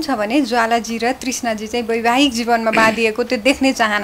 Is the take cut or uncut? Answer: uncut